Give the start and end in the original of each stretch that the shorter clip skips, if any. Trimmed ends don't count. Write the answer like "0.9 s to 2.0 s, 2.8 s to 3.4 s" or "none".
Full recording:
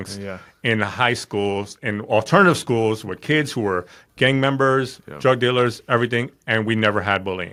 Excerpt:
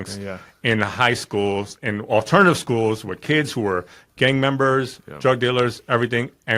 none